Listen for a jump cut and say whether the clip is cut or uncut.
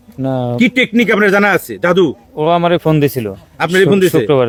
uncut